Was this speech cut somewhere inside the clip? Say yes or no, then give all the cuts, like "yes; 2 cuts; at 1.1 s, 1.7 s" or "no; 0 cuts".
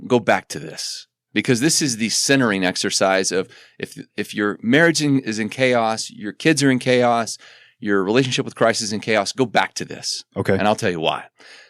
no; 0 cuts